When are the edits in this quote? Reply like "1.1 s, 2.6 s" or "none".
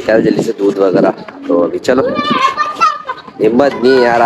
none